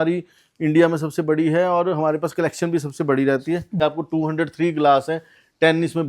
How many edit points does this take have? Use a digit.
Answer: 1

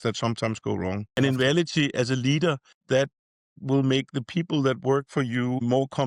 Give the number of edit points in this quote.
1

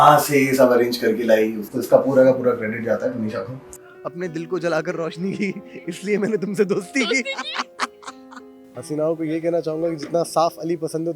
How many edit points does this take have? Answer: 3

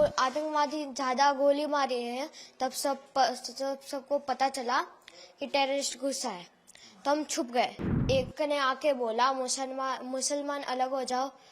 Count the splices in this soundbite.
1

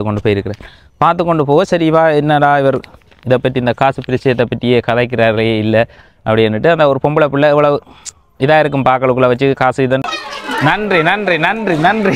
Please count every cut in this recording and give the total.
1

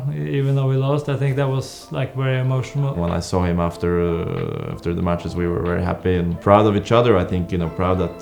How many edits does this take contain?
1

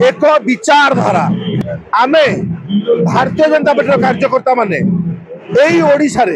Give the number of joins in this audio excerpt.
1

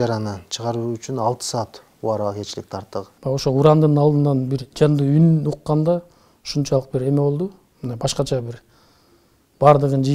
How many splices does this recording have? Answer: 1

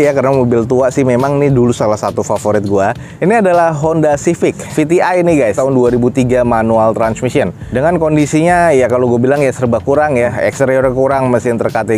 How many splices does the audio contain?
0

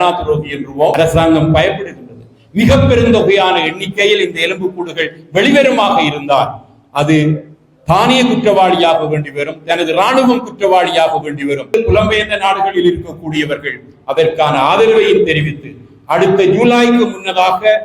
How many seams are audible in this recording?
2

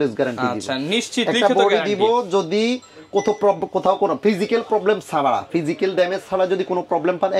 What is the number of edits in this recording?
0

